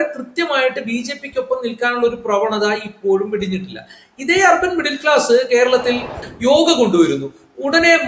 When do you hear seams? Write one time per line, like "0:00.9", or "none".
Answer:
0:06.2